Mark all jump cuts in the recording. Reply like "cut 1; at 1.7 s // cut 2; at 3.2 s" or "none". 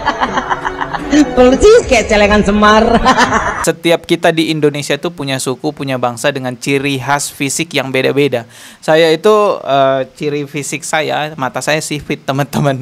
cut 1; at 3.6 s